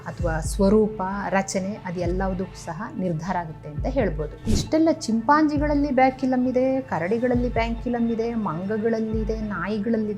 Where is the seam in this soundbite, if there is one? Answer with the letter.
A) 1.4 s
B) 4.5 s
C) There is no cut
B